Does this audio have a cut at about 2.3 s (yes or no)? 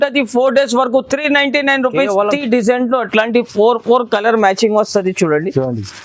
yes